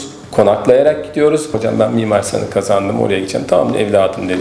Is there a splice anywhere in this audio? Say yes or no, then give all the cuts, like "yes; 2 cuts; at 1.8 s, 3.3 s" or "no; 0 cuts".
yes; 1 cut; at 1.6 s